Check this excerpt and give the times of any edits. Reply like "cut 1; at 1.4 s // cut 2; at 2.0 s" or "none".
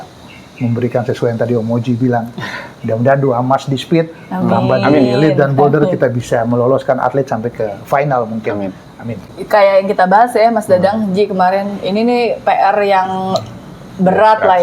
none